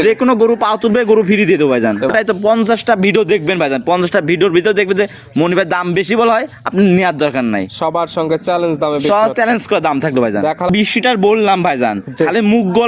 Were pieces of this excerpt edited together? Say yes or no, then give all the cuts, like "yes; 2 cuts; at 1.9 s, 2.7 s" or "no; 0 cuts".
yes; 2 cuts; at 2.1 s, 10.7 s